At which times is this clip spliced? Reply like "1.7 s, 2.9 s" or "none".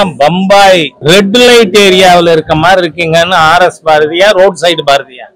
0.9 s